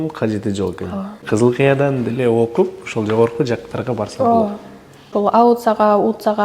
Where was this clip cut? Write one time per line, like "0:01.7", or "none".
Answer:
0:01.2
0:05.1